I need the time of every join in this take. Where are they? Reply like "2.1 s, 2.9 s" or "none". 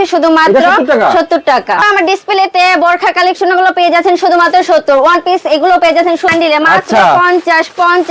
1.8 s, 6.3 s